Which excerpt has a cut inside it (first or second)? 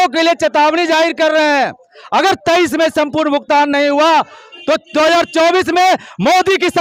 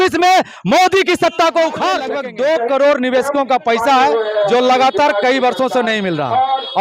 second